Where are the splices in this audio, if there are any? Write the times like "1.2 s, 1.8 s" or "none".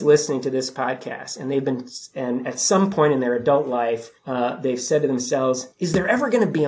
4.2 s, 5.7 s